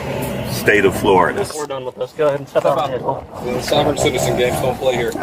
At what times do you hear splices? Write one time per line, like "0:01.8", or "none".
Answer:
0:01.6
0:03.3